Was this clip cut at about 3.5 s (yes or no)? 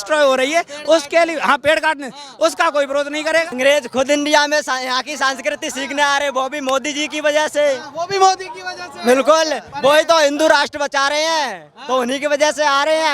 yes